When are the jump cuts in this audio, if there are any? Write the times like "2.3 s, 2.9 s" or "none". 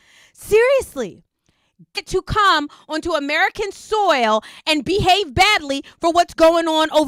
2.0 s